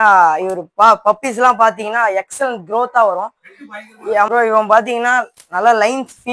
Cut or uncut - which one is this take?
cut